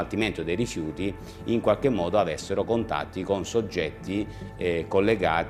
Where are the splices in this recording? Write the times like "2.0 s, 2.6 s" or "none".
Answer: none